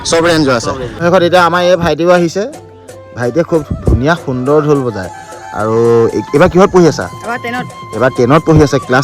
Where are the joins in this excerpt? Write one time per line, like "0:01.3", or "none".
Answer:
0:01.0